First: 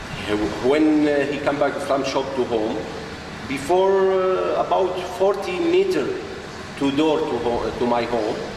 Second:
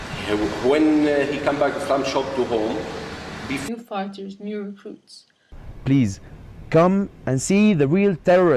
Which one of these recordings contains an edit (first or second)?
first